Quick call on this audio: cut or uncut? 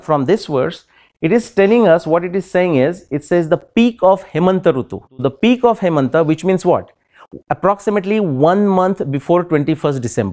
cut